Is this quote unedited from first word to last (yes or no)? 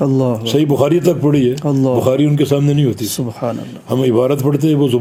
yes